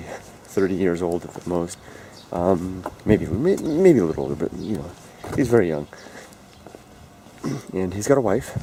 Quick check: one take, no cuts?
yes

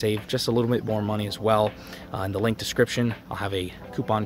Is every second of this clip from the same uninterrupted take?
yes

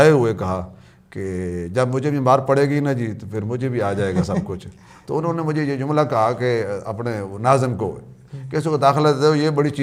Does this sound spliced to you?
no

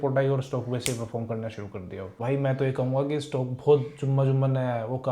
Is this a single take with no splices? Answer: no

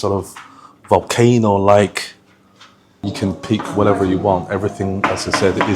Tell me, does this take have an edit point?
yes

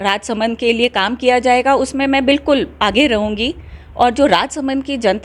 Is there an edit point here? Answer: no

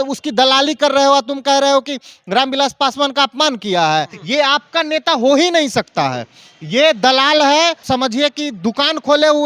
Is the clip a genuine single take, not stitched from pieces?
no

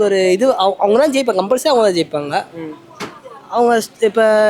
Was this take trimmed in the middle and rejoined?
no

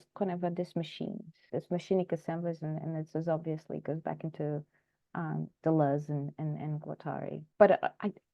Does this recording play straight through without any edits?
no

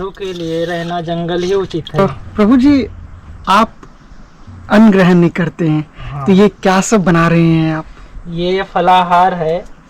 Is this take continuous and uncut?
no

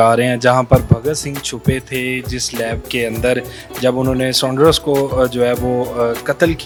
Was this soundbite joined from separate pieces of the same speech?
no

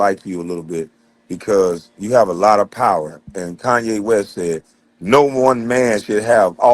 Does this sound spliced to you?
no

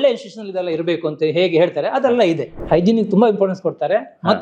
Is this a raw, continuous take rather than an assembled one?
no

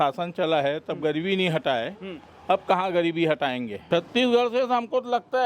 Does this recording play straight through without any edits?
no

